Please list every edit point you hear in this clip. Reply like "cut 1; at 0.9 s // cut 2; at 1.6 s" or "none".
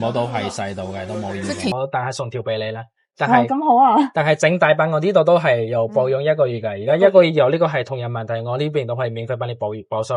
cut 1; at 1.7 s